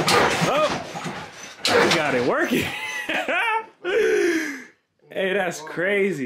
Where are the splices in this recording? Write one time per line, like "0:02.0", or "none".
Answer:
none